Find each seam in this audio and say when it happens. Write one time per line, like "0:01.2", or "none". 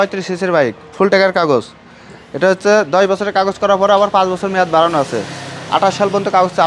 none